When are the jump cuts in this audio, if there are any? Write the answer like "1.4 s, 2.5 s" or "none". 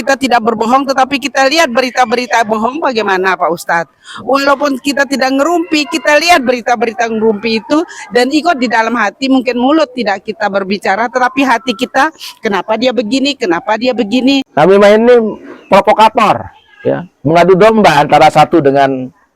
14.5 s